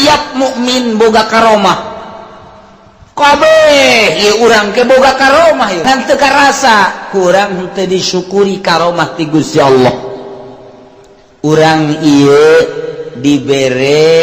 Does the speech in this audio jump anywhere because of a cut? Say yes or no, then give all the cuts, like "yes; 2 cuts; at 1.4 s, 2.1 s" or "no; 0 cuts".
yes; 1 cut; at 5.8 s